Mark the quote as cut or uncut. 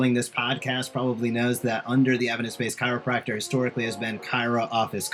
uncut